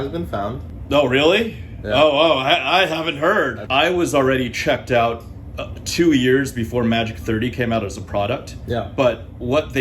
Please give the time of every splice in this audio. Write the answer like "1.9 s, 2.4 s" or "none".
3.7 s